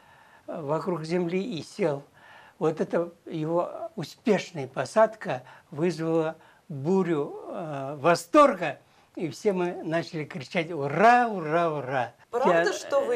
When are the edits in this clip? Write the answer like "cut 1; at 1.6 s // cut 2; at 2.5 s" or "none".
cut 1; at 12.2 s